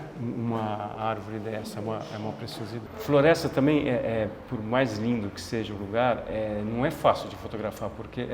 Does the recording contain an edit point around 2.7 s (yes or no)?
yes